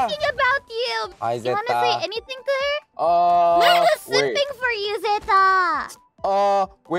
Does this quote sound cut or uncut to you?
cut